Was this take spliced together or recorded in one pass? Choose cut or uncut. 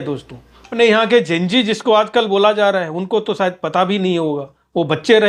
uncut